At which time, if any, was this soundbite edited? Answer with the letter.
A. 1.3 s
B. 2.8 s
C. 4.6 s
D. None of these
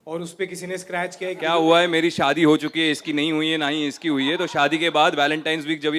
A